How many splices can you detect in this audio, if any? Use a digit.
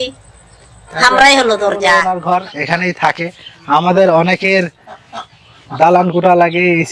1